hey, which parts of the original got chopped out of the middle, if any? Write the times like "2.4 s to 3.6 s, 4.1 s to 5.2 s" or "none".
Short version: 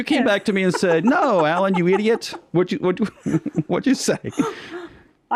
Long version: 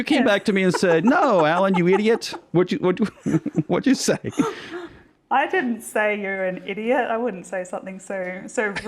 none